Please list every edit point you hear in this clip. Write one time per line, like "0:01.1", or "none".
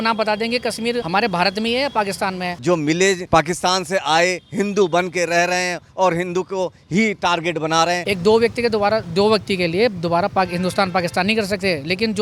0:02.6
0:08.0